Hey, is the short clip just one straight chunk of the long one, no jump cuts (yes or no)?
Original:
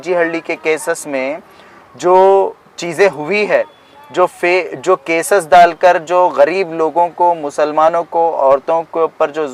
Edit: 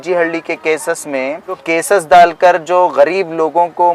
no